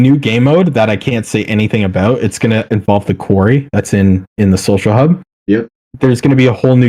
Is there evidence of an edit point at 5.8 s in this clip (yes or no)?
yes